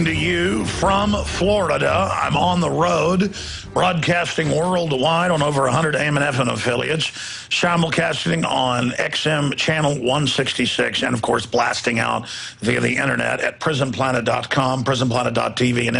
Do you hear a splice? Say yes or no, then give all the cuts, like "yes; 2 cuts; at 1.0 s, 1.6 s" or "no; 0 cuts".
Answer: no; 0 cuts